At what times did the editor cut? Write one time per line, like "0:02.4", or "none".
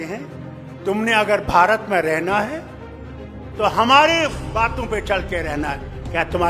none